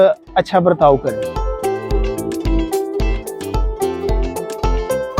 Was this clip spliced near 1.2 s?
yes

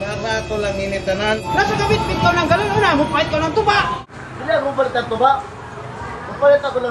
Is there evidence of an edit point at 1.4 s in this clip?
yes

